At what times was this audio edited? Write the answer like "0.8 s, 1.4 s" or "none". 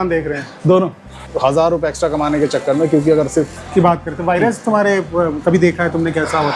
1.2 s, 3.6 s